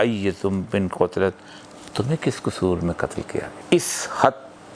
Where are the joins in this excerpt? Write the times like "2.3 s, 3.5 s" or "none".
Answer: 3.6 s